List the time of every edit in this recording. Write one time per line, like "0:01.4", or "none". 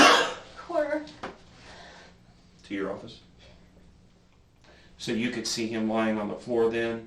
0:04.5